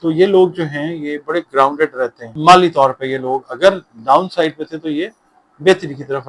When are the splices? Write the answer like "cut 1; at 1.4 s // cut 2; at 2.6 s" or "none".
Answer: cut 1; at 2.2 s